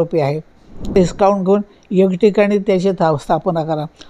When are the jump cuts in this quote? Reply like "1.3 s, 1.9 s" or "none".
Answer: 0.9 s